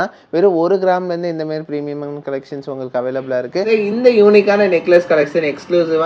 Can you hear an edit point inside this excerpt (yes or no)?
yes